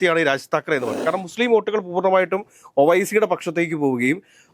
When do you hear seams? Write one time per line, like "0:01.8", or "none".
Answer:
0:00.9